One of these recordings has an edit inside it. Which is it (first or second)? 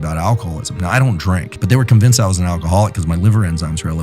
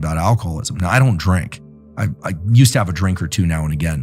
first